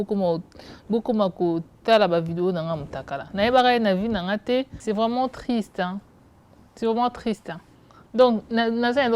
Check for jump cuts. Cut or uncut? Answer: cut